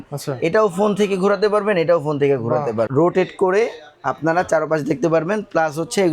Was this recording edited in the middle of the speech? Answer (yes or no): yes